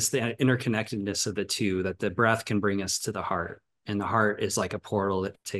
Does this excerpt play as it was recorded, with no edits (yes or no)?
yes